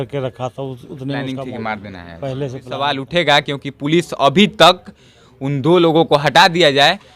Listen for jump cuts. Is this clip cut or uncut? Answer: cut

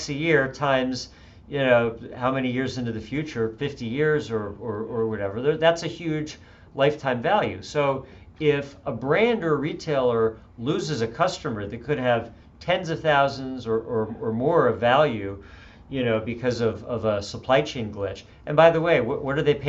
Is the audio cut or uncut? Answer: uncut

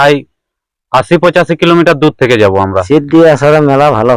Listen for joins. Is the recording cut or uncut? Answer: cut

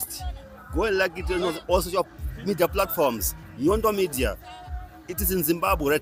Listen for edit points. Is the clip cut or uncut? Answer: uncut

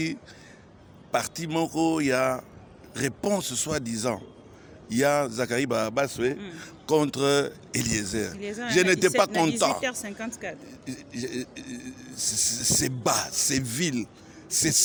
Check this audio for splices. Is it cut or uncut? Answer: uncut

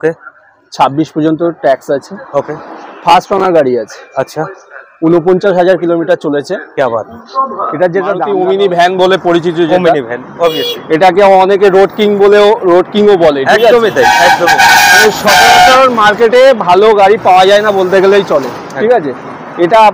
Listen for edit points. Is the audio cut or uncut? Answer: cut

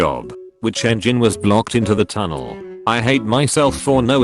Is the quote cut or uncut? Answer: uncut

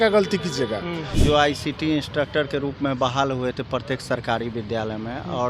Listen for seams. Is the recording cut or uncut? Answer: cut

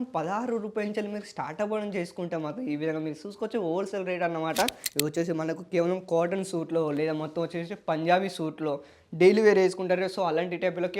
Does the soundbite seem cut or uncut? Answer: cut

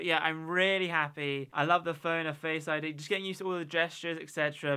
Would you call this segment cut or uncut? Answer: uncut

